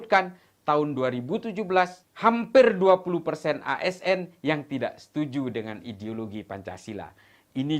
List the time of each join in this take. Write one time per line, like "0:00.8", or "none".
0:02.0